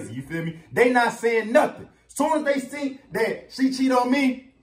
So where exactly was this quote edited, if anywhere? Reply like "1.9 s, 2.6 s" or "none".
none